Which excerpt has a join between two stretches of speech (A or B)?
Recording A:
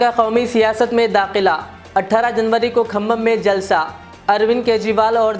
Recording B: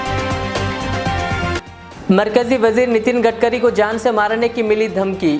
B